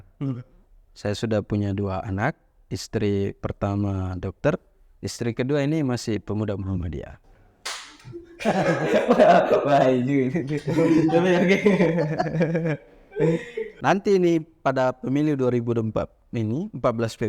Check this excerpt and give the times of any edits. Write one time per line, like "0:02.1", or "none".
0:13.7